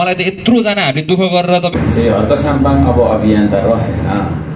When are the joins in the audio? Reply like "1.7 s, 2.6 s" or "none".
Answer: 1.8 s